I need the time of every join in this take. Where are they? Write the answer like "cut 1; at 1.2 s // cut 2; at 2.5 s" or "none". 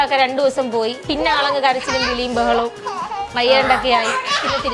cut 1; at 1.0 s